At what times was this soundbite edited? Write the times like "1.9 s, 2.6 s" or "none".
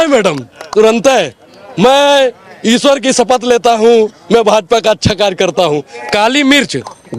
5.9 s